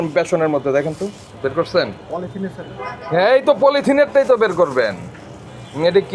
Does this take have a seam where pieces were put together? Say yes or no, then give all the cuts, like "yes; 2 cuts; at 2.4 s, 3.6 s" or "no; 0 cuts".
no; 0 cuts